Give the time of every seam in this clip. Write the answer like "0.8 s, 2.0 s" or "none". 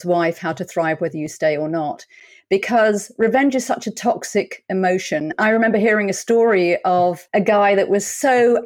5.3 s, 7.2 s